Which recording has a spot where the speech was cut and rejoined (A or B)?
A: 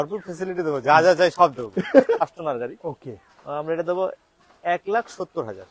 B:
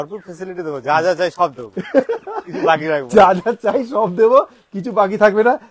A